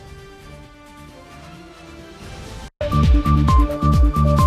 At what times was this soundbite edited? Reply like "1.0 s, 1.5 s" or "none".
2.7 s